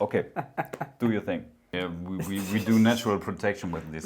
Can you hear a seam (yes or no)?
yes